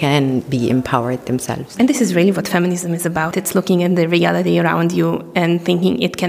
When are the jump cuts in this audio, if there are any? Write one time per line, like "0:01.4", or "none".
0:01.2
0:03.3